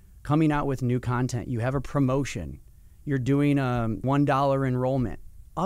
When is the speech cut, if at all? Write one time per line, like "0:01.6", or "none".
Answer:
0:04.0